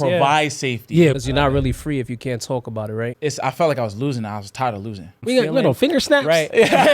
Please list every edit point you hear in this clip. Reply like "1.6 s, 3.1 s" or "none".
1.2 s, 3.2 s, 5.2 s